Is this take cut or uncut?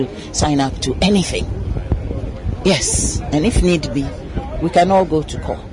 uncut